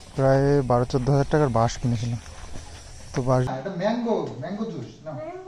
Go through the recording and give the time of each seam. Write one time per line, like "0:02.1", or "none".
0:03.5